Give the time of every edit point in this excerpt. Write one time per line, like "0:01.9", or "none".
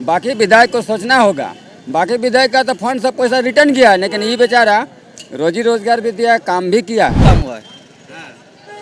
0:07.2